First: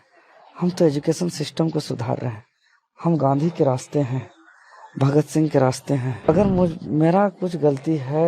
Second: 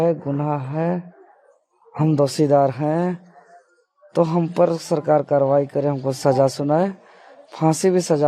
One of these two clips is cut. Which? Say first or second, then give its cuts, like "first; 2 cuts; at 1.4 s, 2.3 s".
first; 1 cut; at 6.3 s